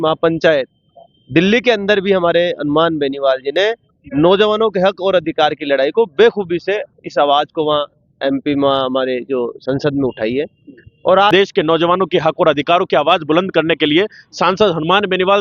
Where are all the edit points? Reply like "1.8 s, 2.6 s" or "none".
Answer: 11.3 s